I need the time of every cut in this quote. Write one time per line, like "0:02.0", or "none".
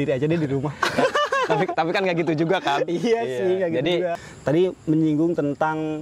0:04.2